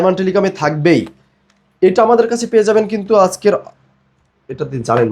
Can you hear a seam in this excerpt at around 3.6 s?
no; 0 cuts

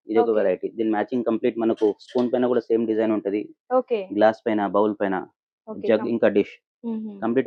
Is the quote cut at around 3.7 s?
no; 0 cuts

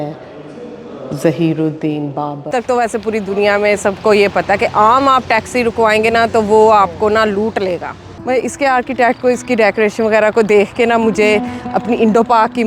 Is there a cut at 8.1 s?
yes; 2 cuts; at 2.5 s, 8.1 s

